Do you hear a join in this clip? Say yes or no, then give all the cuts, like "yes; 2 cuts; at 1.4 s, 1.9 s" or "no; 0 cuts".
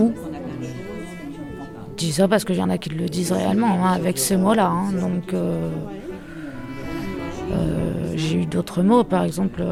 no; 0 cuts